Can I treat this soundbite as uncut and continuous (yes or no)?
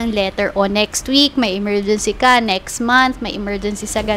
yes